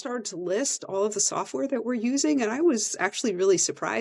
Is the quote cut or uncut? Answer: uncut